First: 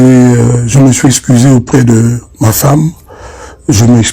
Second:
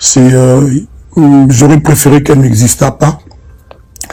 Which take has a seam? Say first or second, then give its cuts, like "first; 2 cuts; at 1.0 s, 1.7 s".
first; 1 cut; at 3.1 s